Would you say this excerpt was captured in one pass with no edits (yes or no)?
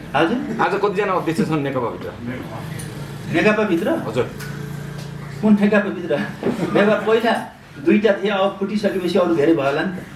yes